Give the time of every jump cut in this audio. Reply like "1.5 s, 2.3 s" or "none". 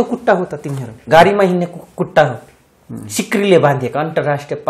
none